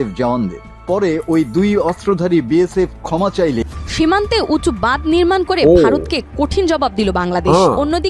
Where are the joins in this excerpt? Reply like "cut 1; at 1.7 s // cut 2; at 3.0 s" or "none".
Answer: cut 1; at 3.6 s